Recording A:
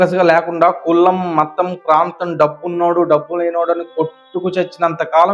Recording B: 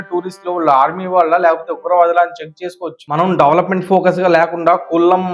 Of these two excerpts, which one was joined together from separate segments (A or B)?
B